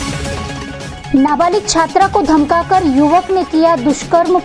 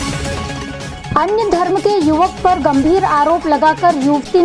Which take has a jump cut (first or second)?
first